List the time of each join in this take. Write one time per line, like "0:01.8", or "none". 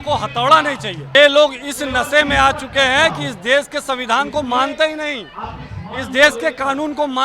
0:01.1